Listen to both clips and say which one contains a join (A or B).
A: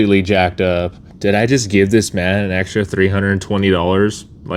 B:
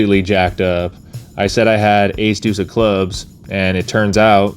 A